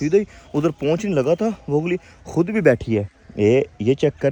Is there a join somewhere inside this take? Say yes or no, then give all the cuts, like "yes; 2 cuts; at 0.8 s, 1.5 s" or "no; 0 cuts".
no; 0 cuts